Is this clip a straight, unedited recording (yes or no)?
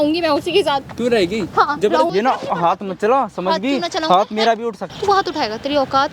no